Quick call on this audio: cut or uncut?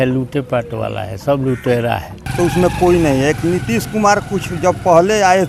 cut